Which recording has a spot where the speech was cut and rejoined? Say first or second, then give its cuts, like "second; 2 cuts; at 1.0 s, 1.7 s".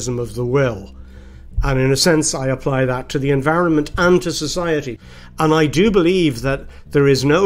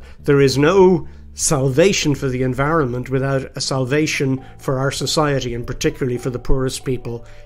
first; 1 cut; at 5.0 s